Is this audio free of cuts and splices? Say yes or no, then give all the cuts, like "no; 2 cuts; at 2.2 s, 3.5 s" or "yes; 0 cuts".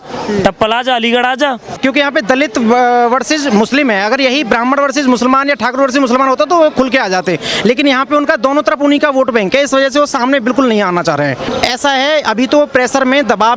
no; 2 cuts; at 1.8 s, 11.5 s